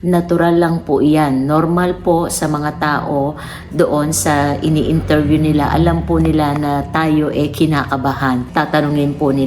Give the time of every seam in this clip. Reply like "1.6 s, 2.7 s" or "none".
8.4 s